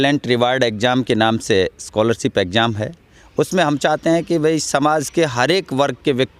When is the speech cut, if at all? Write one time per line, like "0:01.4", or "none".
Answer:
none